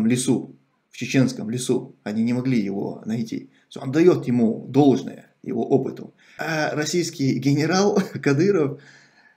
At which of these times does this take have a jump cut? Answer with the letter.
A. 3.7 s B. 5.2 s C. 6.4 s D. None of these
C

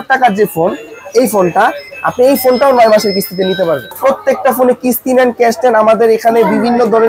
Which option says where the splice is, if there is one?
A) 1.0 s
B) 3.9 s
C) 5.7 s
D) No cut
B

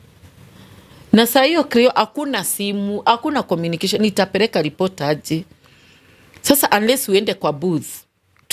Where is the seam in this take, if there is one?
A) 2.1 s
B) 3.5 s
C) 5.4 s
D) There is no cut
D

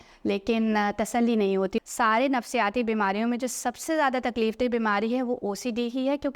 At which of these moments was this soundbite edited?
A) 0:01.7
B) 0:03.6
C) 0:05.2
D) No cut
A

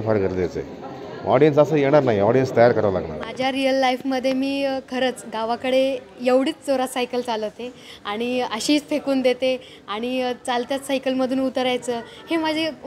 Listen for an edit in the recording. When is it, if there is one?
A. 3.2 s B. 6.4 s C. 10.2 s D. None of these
A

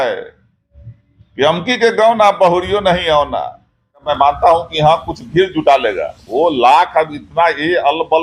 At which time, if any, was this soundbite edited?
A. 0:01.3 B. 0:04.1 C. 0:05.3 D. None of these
B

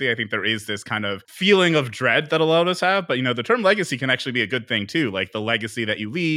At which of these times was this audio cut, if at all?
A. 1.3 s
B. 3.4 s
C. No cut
A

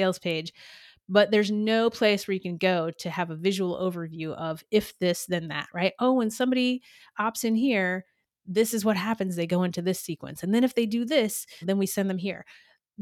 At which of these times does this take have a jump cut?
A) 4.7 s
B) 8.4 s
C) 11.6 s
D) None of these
C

